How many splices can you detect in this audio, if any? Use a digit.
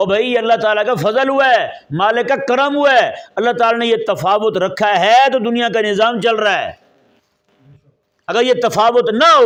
0